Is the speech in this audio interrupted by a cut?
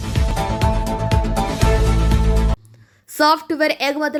no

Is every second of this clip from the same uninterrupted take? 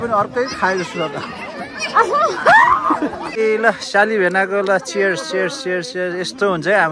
no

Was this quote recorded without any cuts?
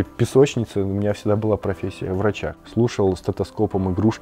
no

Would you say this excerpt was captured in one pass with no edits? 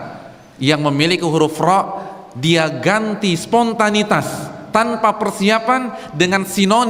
yes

